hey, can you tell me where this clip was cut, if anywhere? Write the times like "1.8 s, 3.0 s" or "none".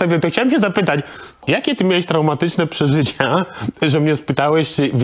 1.4 s